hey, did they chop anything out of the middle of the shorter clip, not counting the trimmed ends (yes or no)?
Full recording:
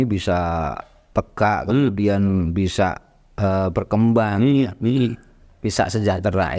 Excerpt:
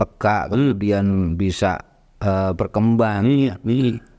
no